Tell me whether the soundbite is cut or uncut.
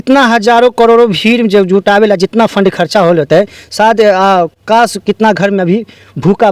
uncut